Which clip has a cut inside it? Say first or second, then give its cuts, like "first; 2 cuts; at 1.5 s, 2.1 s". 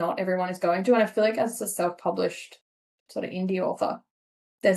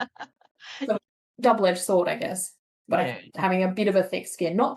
second; 2 cuts; at 1.0 s, 3.3 s